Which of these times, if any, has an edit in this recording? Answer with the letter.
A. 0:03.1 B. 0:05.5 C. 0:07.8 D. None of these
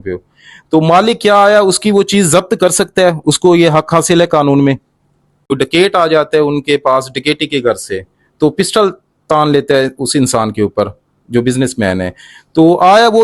B